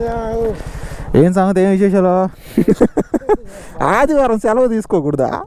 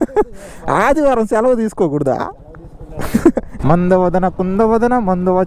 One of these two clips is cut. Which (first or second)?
second